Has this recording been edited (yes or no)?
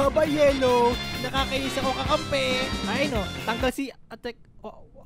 yes